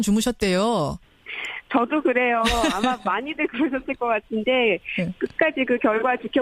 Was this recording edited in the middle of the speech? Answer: no; 0 cuts

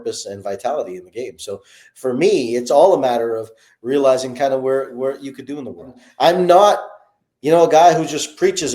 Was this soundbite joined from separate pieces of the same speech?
yes; 1 cut; at 6.0 s

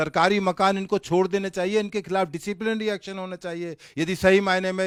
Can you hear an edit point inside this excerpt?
no; 0 cuts

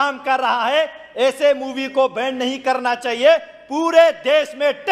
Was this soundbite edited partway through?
no; 0 cuts

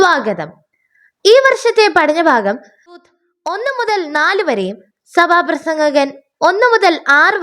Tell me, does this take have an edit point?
yes; 1 cut; at 3.0 s

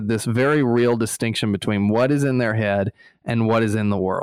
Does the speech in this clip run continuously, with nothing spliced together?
yes; 0 cuts

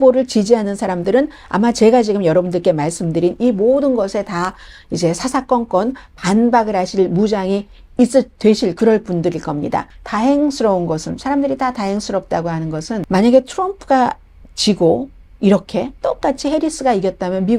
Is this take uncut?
no; 2 cuts; at 9.9 s, 13.0 s

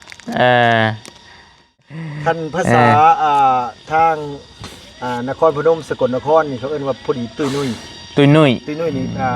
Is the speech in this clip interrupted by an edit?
yes; 1 cut; at 1.8 s

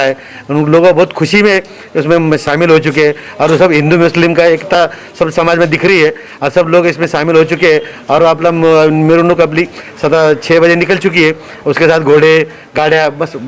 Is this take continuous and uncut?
yes; 0 cuts

